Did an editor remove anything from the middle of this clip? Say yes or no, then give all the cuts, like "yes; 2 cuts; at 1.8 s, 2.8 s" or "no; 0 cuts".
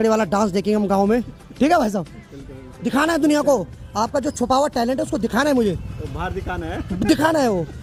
no; 0 cuts